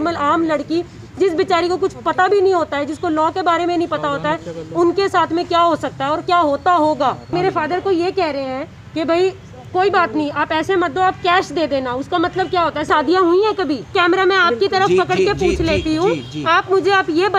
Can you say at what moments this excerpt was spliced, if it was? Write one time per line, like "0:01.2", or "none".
0:07.3
0:12.9
0:13.9